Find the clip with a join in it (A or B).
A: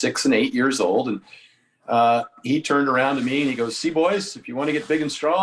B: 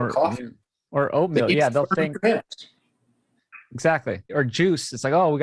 B